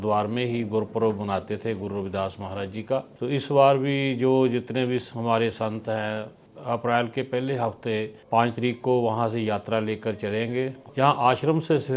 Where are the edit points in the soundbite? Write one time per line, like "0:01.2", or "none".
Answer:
0:03.1
0:06.4
0:08.2
0:10.8